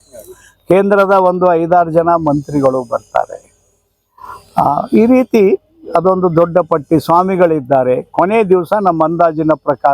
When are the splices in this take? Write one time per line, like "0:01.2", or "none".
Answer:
none